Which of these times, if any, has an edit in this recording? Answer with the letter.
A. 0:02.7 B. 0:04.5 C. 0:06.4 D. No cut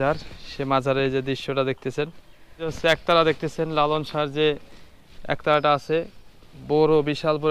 A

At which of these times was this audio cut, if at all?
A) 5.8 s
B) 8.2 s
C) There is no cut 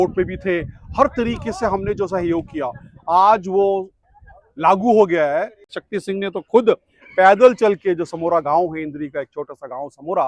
A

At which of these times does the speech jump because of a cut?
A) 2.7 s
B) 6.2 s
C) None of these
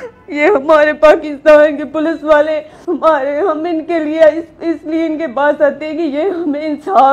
A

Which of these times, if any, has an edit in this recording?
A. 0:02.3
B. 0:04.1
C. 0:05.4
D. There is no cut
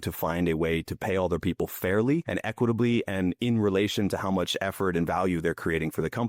A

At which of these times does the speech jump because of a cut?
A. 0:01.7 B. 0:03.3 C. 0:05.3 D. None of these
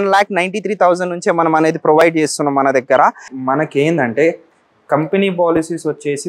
B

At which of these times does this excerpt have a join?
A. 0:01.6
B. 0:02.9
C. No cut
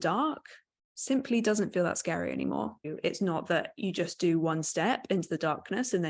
B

